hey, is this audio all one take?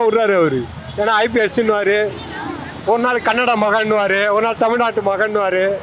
yes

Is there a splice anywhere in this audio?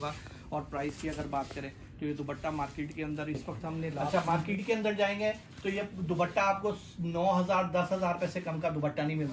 yes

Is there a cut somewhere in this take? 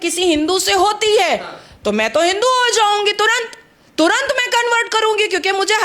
no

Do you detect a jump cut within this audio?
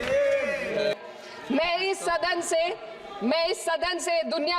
yes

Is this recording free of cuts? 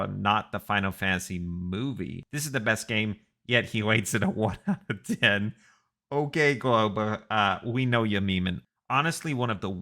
no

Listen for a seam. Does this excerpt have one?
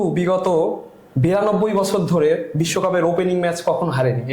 no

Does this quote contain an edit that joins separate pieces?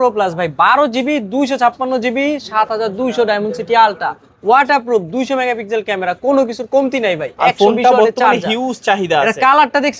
no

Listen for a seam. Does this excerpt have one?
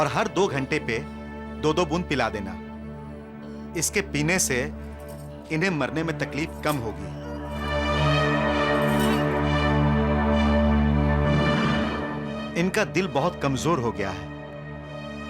no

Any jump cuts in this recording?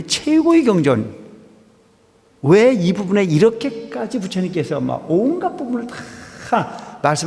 no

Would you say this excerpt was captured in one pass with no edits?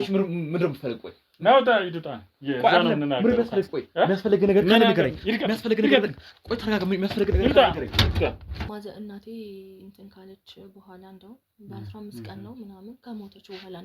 no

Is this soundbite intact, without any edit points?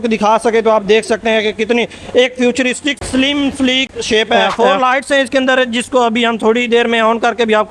no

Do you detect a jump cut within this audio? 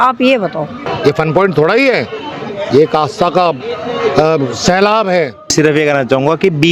yes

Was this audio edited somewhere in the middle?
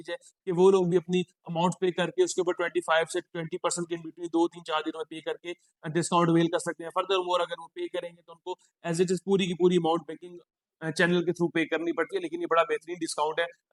no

